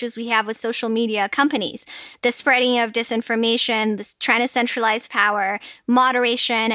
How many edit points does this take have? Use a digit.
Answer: 0